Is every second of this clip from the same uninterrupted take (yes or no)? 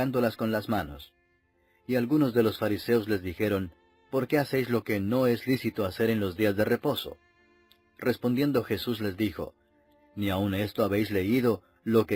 yes